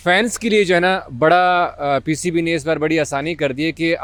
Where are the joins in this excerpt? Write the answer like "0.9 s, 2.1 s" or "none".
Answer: none